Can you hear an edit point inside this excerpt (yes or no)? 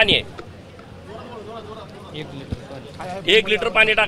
no